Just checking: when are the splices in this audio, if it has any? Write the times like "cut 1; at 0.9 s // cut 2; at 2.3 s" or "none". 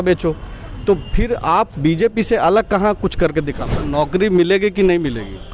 cut 1; at 3.8 s